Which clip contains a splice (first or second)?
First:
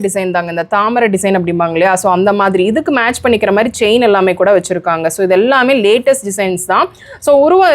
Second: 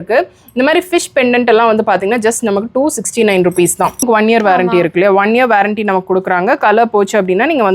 second